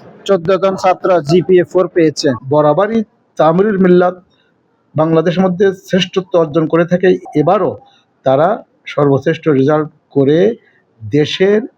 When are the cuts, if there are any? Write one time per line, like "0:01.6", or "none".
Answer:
0:02.4